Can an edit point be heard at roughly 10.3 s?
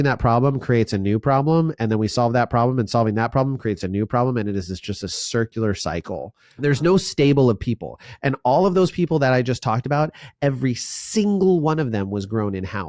no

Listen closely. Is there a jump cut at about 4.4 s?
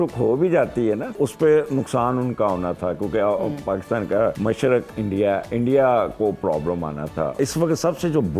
yes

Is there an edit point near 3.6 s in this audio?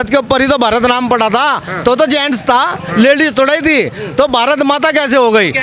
no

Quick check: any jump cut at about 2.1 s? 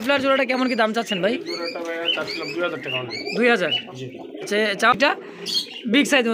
no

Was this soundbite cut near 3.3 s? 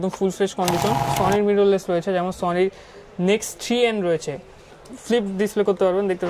no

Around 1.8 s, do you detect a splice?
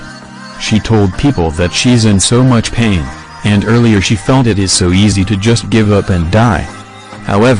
yes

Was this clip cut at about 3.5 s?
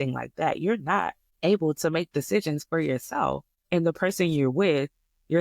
yes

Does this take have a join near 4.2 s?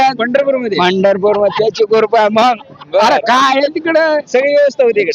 no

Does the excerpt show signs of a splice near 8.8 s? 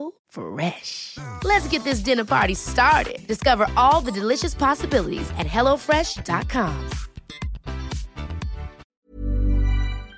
yes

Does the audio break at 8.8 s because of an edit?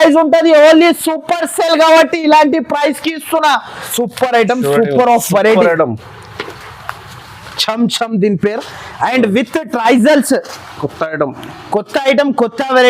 no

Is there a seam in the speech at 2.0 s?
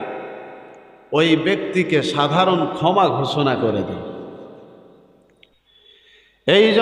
no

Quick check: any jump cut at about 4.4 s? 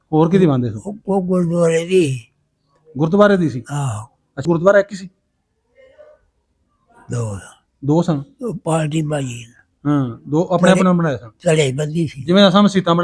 yes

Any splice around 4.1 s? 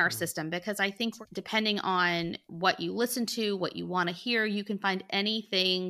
no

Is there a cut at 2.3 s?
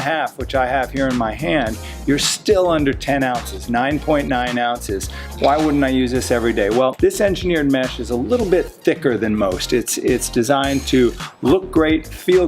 no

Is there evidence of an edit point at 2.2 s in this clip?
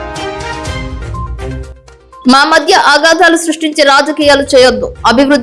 yes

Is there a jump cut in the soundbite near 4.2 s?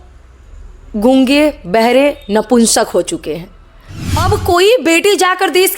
yes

